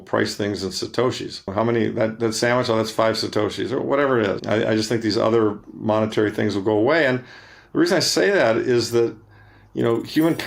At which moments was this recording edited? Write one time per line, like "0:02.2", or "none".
0:01.5
0:04.4